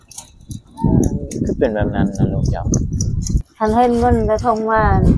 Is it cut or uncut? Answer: cut